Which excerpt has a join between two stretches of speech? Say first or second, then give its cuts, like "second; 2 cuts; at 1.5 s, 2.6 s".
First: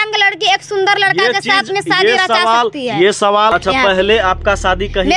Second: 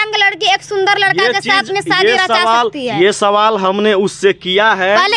first; 1 cut; at 3.5 s